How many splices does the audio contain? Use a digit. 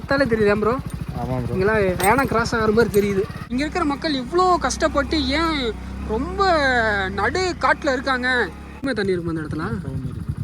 2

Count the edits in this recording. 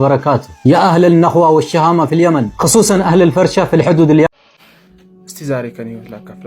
1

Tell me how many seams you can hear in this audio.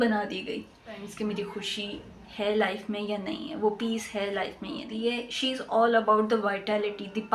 2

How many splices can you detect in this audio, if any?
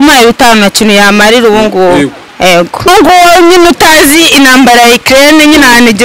1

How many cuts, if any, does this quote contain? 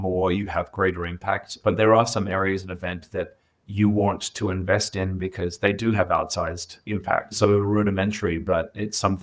2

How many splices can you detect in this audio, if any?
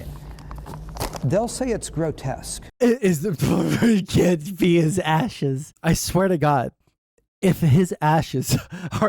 1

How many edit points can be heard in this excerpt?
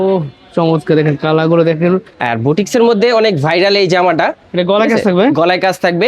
2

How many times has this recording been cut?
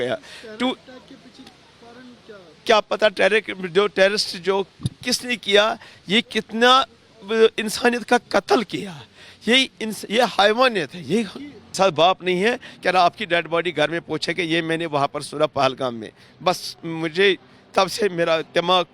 1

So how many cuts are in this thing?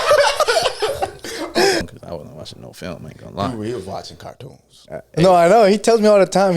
1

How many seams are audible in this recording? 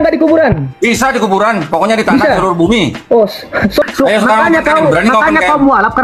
1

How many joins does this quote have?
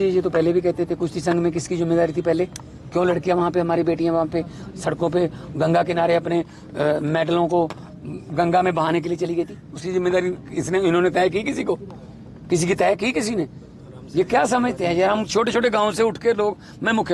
1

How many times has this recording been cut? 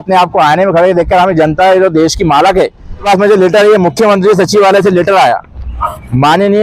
1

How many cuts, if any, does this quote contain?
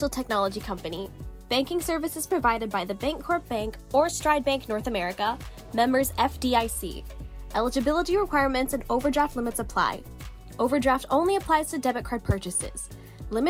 0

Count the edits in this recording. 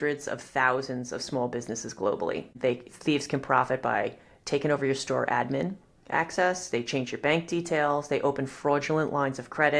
1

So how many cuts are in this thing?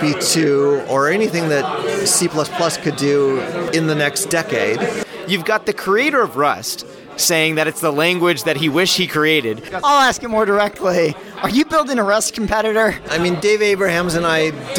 3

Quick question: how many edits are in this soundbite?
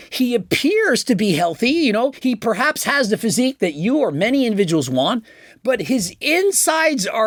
0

